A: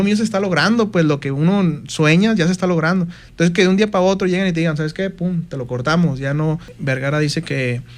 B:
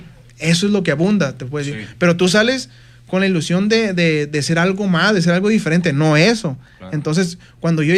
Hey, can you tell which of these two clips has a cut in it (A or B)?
A